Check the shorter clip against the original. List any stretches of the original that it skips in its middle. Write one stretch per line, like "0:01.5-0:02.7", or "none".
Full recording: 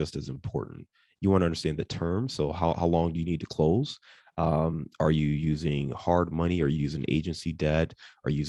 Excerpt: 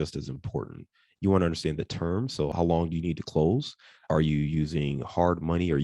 0:02.5-0:02.8
0:04.2-0:04.8